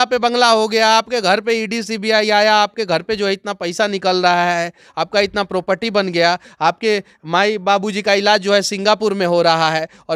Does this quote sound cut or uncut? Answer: uncut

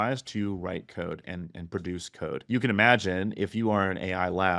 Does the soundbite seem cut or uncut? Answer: cut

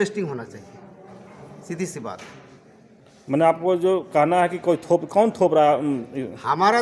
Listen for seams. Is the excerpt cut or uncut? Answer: uncut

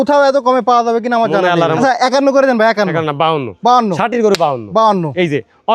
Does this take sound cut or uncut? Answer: cut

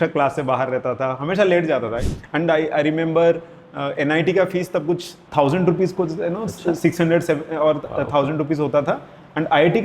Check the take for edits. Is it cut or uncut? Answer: cut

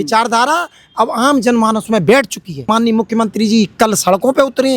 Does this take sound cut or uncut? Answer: cut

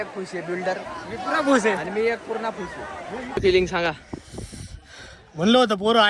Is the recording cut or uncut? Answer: cut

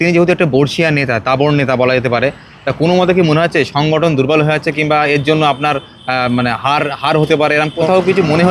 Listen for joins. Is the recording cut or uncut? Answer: cut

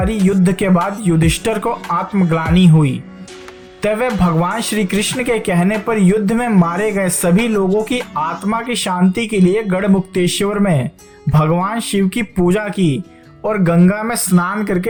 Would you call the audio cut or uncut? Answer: uncut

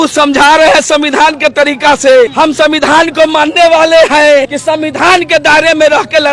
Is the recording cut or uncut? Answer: cut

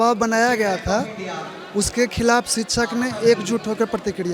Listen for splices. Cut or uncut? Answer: uncut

